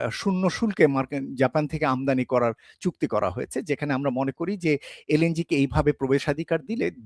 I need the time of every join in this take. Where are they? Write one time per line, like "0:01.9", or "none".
none